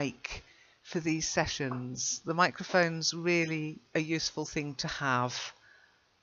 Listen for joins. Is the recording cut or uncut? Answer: uncut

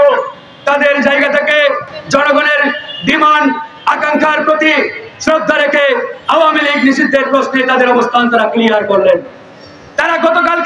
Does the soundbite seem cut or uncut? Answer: uncut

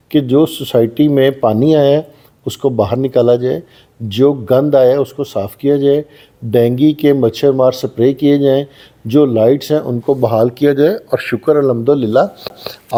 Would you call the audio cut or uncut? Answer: uncut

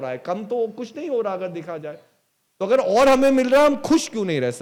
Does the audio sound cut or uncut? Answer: uncut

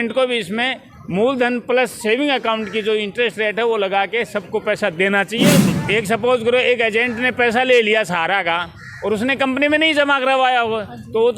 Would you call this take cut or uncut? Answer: cut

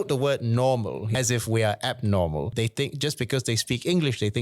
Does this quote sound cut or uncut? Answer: cut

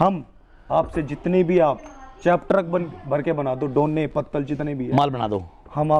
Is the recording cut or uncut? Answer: uncut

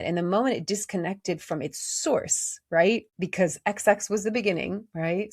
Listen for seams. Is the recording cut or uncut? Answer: cut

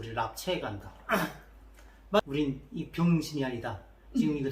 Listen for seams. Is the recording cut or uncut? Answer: cut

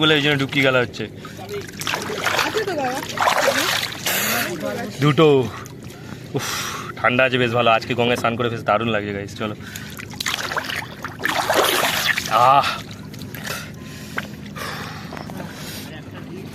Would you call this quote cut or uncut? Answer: uncut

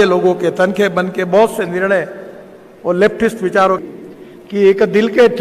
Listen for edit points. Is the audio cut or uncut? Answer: cut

